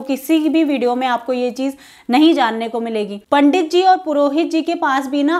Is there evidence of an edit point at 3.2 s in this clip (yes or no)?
yes